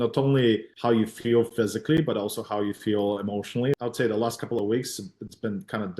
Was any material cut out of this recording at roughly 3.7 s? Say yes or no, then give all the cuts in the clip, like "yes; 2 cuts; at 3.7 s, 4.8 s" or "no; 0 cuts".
yes; 1 cut; at 3.7 s